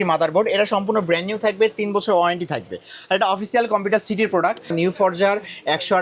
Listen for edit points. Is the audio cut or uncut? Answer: cut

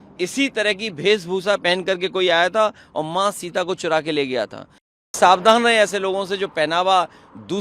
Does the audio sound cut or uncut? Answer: cut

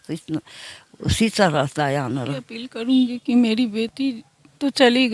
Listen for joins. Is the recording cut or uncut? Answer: cut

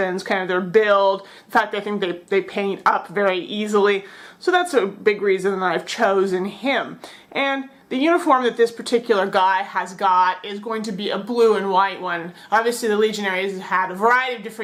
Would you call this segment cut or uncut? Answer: uncut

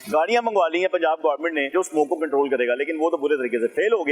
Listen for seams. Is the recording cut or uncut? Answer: cut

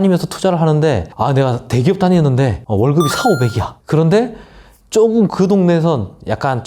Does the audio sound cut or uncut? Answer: cut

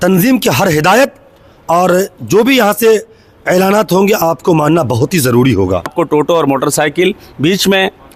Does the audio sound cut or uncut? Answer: cut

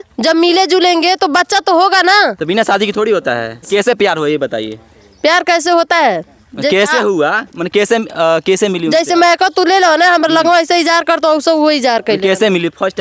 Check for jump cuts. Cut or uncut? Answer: cut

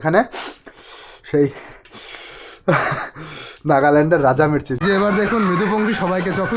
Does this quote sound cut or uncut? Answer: cut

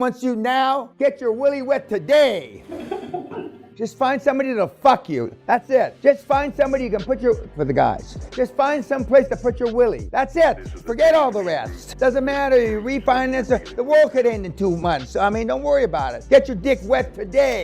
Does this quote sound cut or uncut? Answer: cut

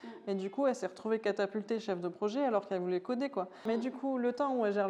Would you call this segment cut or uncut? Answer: cut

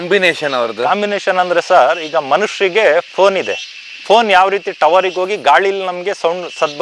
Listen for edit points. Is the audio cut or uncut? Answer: uncut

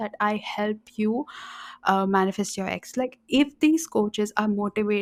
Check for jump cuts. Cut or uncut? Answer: uncut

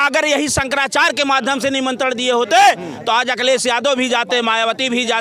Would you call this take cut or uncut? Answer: uncut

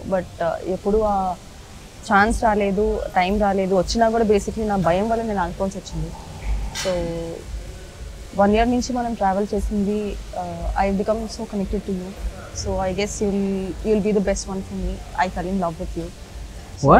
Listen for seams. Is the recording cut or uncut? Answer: uncut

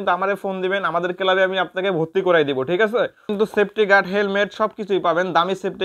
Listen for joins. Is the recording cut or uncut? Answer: cut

